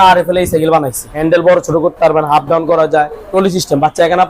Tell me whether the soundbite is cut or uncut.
cut